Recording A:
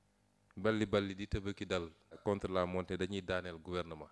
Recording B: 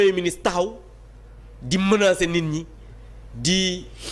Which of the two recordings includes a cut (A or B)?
A